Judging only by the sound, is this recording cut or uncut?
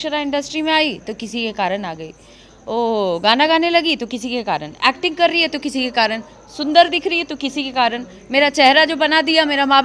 uncut